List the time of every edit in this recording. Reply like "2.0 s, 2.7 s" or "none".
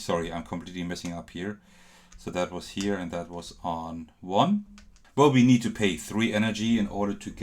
5.0 s